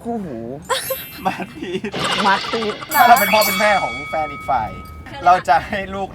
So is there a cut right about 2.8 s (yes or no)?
yes